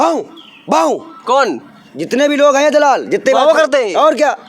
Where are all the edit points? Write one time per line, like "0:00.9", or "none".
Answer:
none